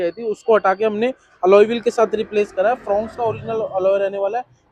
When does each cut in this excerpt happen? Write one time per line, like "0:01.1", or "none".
none